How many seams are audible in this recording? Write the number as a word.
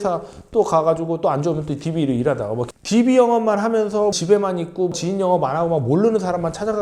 one